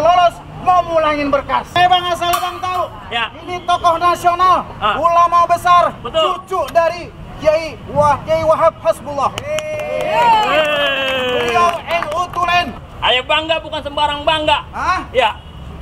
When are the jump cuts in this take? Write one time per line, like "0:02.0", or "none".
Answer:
0:01.8
0:12.8